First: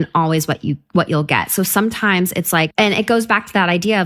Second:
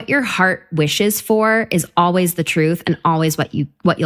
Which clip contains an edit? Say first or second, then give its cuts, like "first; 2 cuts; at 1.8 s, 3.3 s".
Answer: first; 1 cut; at 2.7 s